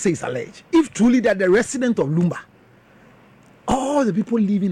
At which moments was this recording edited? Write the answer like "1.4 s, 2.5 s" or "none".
none